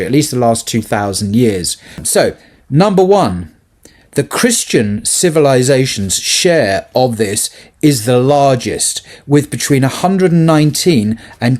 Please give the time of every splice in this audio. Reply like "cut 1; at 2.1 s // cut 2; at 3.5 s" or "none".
cut 1; at 2.0 s